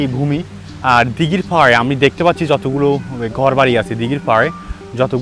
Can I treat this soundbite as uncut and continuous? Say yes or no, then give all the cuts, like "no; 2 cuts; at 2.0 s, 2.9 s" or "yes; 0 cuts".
yes; 0 cuts